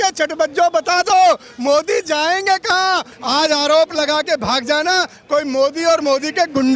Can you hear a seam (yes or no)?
yes